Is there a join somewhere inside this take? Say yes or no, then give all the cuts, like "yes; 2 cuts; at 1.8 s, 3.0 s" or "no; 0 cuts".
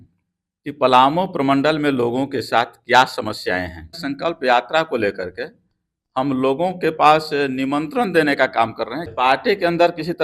yes; 2 cuts; at 4.1 s, 9.1 s